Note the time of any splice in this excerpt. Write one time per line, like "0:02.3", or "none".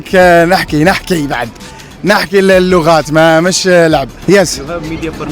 0:04.1

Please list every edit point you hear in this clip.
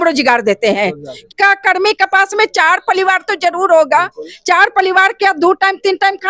0:01.2

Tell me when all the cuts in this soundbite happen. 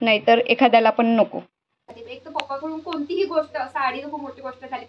0:02.0

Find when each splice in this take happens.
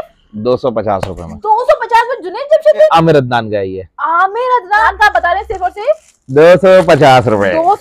0:02.9
0:04.8

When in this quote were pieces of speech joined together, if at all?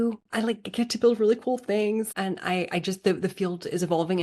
0:02.1

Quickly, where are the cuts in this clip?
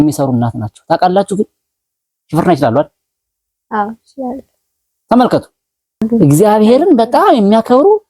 0:06.0

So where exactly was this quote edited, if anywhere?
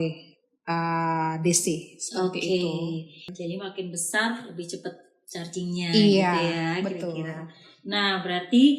none

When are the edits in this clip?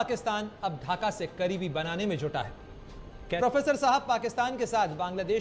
0:03.2

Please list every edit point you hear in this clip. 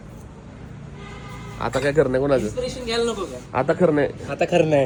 none

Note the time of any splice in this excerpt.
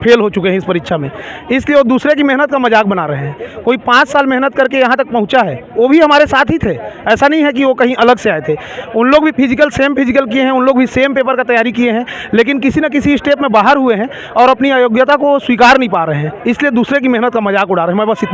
none

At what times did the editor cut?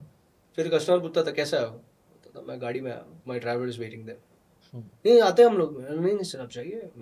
0:03.1

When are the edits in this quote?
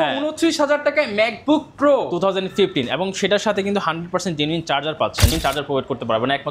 0:05.4

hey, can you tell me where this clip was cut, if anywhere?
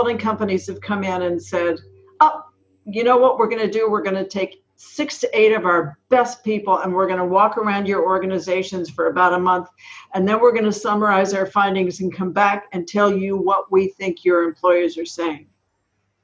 none

